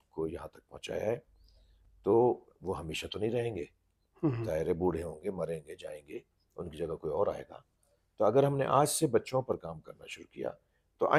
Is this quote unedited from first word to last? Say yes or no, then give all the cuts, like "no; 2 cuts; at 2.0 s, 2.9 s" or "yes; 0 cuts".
yes; 0 cuts